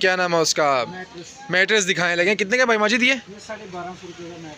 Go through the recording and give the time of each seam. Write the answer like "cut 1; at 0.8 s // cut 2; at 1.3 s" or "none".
none